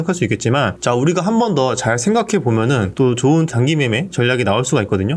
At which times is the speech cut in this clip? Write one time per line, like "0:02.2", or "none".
0:02.9